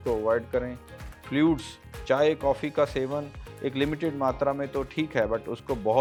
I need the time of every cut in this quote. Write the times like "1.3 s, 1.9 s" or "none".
none